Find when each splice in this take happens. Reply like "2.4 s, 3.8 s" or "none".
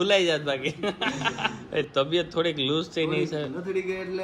1.5 s